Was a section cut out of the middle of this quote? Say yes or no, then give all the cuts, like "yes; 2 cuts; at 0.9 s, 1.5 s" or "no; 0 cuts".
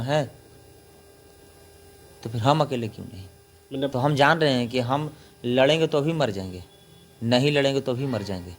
yes; 1 cut; at 3.9 s